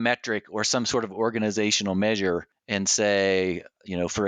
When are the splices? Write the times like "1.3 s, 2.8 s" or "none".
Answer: 2.6 s